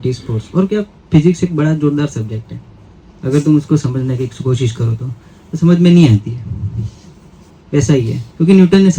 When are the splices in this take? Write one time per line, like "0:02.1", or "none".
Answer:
none